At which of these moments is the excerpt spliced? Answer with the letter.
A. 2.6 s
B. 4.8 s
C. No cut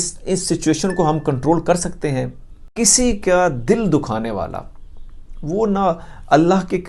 A